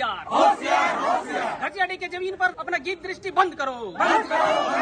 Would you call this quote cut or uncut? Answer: cut